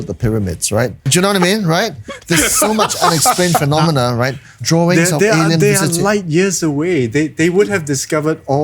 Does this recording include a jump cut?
yes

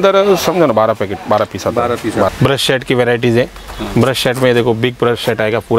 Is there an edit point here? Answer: yes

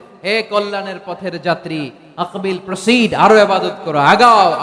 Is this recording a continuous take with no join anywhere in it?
yes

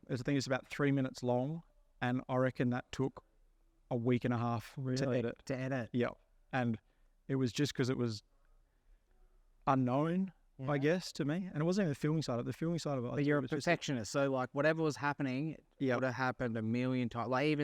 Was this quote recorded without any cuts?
yes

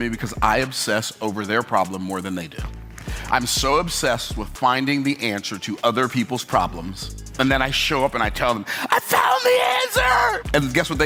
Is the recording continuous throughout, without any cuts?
yes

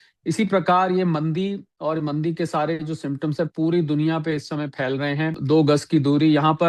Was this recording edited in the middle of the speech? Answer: yes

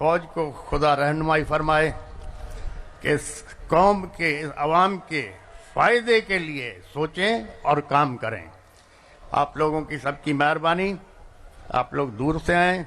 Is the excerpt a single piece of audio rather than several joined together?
yes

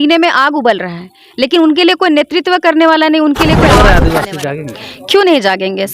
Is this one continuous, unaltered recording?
no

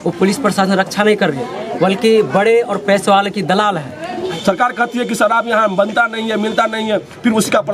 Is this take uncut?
no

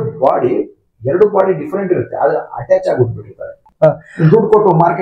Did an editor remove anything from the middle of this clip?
yes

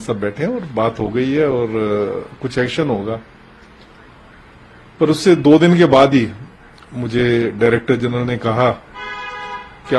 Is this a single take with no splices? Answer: yes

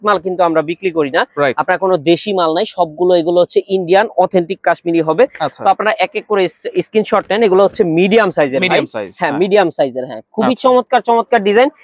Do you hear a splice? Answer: no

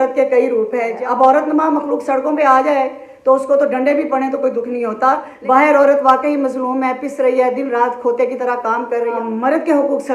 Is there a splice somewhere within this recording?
yes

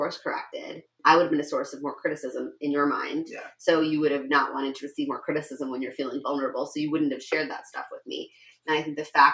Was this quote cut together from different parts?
yes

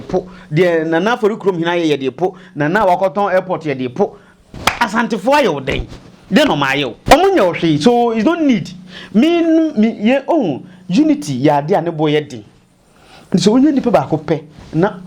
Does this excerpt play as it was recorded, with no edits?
no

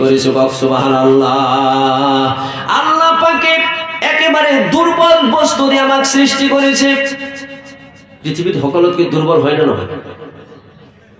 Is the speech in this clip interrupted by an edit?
no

